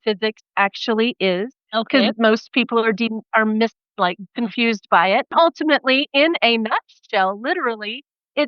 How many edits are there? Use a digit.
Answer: 0